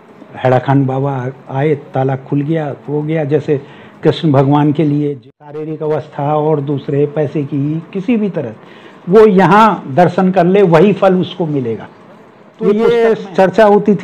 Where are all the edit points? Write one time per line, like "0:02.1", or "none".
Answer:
0:05.1
0:12.7